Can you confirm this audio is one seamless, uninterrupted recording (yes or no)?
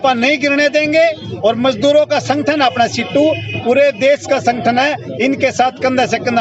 yes